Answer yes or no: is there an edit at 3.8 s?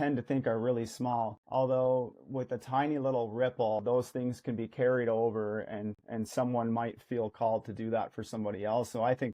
yes